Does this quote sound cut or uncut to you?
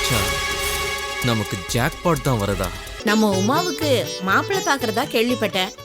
cut